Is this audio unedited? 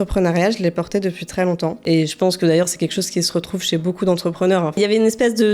no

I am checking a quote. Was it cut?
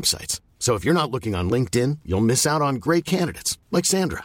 no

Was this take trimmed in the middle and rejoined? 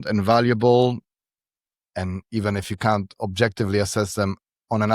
no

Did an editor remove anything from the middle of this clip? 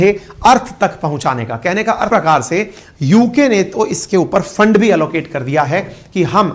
yes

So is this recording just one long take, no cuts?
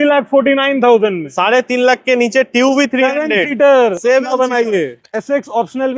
no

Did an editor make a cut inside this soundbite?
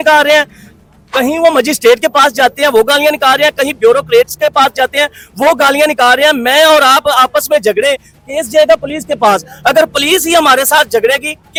no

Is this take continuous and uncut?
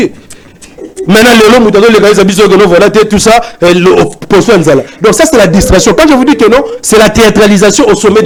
yes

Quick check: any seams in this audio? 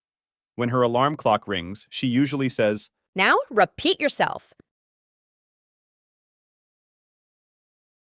no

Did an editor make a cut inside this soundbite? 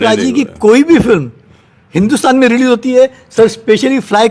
no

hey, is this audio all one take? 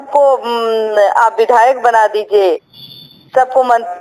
yes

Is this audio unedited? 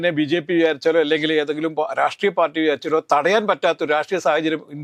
yes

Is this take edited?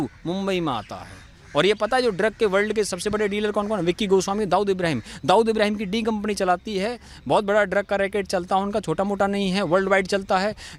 no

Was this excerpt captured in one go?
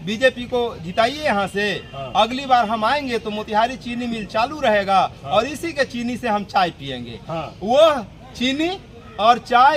yes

